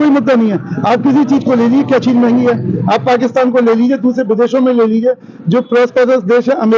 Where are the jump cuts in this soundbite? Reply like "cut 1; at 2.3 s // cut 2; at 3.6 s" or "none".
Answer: none